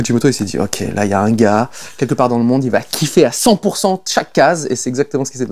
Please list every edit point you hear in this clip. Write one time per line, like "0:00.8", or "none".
none